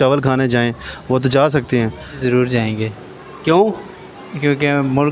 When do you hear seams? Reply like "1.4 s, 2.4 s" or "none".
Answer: 2.1 s